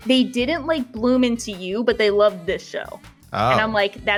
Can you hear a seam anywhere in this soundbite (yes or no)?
no